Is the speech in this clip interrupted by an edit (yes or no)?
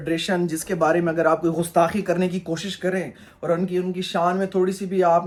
no